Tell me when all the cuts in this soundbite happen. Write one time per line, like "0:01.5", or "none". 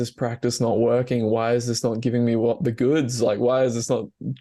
none